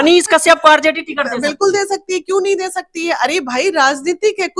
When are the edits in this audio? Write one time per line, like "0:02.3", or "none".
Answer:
none